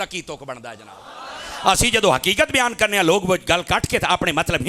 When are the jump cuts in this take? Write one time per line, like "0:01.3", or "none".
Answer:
none